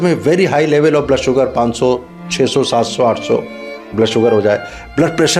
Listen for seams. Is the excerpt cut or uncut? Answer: uncut